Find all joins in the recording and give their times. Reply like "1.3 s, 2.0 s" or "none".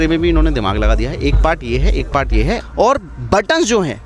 2.6 s